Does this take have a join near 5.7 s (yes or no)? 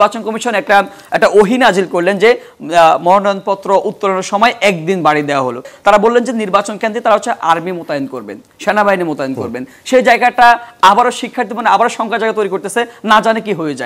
yes